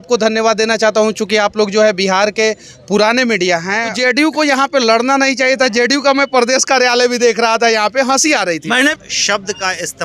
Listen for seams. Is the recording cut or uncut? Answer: cut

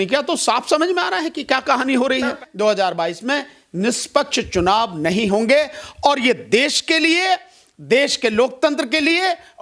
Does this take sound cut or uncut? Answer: cut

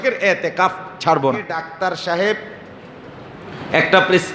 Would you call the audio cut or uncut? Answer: cut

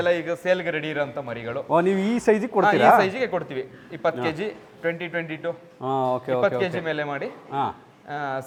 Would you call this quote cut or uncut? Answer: uncut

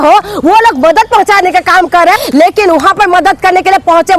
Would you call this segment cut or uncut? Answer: cut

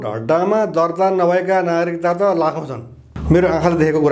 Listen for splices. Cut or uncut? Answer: cut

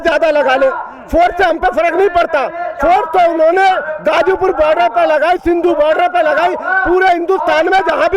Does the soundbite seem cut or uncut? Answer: uncut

